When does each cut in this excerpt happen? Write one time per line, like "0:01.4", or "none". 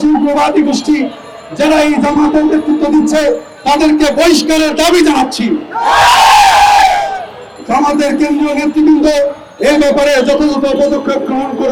none